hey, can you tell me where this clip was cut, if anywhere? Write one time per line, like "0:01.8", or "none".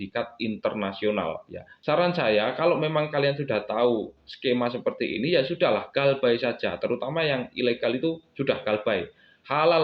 0:01.8